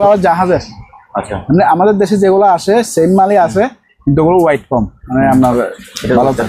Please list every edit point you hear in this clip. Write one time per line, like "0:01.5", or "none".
none